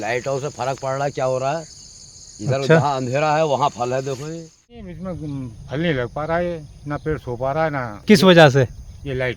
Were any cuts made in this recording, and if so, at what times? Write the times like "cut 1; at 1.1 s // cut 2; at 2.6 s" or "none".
cut 1; at 4.9 s // cut 2; at 7.9 s

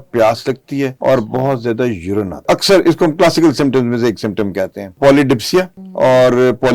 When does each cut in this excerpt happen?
cut 1; at 0.9 s // cut 2; at 2.5 s // cut 3; at 5.0 s // cut 4; at 5.8 s

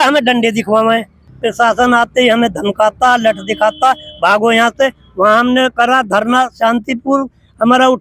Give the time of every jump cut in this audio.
cut 1; at 1.2 s

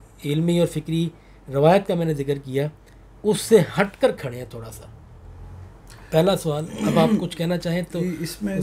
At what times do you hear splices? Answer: none

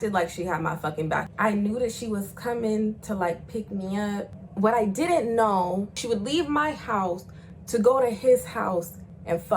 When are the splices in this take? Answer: cut 1; at 1.3 s // cut 2; at 4.4 s // cut 3; at 6.0 s

